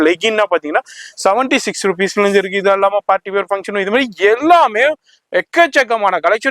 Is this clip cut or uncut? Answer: uncut